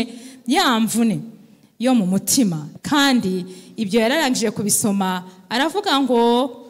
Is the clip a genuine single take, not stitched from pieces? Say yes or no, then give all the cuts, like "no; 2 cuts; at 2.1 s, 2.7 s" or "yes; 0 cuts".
no; 1 cut; at 2.7 s